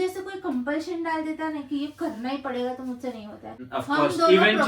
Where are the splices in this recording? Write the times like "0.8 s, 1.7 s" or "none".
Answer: 3.6 s